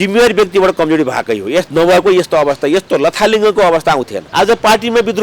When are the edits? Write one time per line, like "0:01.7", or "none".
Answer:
0:04.2